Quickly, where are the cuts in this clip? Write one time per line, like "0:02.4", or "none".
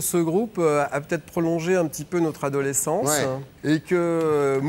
0:03.5